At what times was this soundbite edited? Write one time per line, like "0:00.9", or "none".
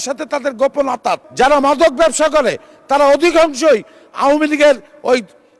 0:01.2